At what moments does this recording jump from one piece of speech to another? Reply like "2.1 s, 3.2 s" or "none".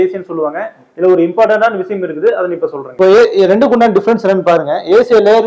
2.8 s